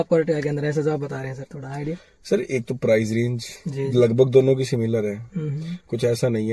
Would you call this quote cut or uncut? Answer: uncut